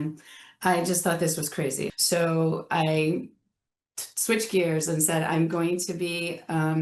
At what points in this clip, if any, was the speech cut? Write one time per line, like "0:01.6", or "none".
0:01.9